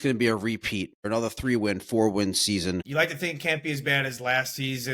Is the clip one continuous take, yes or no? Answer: no